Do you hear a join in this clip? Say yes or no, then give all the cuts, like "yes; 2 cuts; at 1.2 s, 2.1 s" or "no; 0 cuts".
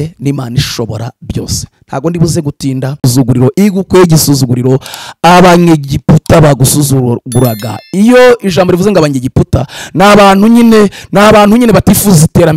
yes; 1 cut; at 3.1 s